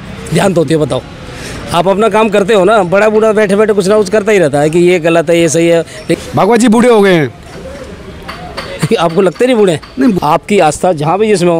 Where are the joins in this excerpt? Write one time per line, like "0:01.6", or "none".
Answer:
0:06.0
0:10.2